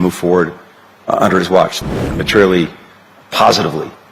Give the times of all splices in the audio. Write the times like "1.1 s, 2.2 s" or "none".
1.8 s